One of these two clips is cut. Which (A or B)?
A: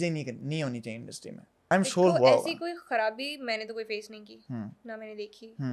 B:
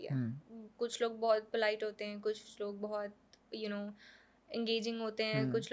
A